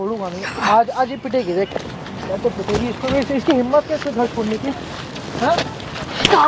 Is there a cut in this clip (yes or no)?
no